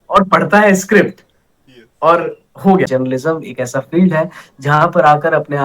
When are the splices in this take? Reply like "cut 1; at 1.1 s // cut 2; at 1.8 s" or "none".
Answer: cut 1; at 2.9 s